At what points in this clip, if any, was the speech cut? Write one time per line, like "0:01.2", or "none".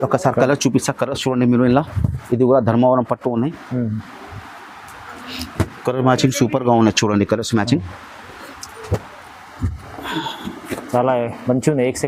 none